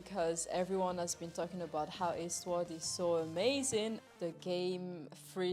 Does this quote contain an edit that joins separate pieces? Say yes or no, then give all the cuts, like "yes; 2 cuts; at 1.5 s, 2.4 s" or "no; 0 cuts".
yes; 1 cut; at 4.0 s